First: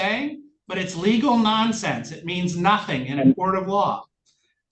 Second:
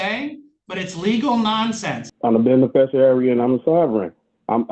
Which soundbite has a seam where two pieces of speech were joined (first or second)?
second